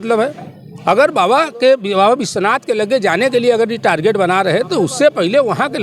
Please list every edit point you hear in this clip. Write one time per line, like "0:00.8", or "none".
none